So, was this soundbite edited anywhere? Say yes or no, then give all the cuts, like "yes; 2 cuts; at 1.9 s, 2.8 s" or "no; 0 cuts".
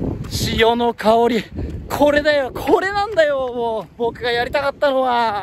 no; 0 cuts